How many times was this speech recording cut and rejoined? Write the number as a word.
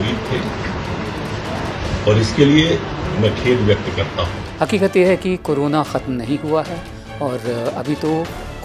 one